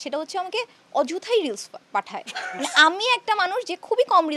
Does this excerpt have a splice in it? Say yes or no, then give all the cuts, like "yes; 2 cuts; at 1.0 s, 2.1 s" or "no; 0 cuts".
no; 0 cuts